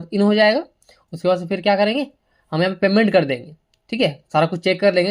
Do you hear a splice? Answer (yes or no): no